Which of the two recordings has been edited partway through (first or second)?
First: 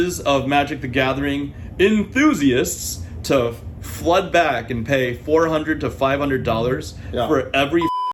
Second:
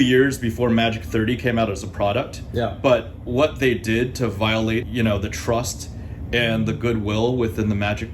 second